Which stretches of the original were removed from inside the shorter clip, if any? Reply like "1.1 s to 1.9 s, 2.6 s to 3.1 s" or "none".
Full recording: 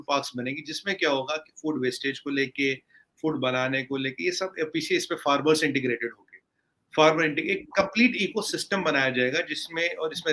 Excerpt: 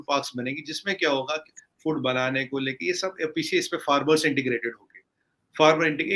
1.5 s to 2.9 s